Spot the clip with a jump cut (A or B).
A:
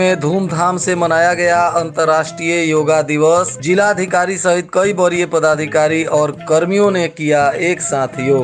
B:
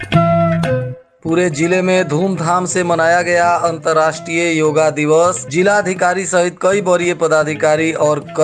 B